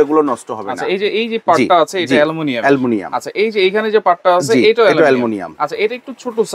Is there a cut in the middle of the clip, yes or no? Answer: no